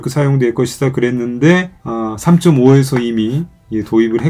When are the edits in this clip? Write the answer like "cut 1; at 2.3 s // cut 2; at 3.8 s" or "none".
none